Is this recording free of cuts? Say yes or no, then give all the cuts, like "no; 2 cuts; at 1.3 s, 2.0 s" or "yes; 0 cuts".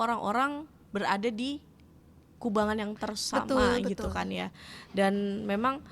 yes; 0 cuts